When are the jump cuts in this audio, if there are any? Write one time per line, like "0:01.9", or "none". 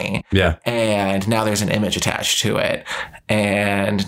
none